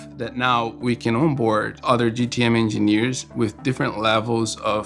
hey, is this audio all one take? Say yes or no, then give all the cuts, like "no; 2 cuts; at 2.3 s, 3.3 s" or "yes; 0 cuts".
no; 1 cut; at 1.7 s